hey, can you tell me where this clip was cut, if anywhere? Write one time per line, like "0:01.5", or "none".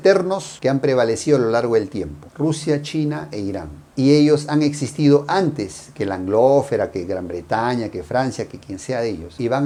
none

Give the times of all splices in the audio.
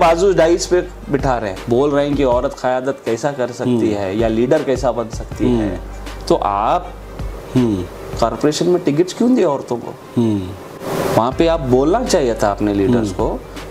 0:01.6
0:10.8

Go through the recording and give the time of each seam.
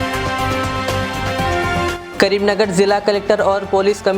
0:02.0

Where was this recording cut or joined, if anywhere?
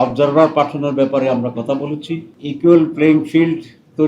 0:02.3

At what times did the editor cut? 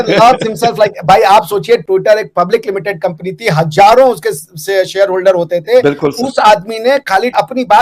none

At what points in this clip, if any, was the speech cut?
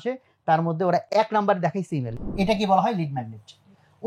0:01.1
0:02.1

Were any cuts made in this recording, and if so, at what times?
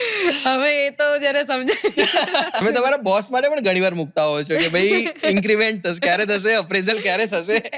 0:02.6

